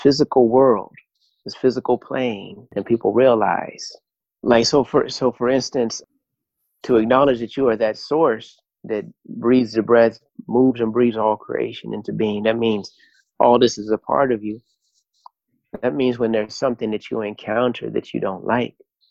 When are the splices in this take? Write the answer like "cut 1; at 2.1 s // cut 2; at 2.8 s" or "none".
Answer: cut 1; at 2.6 s